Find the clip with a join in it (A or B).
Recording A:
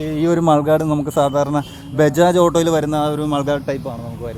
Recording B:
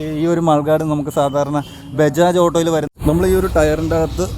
B